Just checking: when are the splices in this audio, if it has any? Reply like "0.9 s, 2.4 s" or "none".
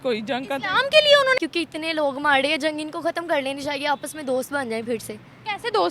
1.4 s